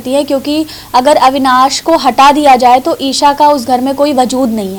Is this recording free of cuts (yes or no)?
yes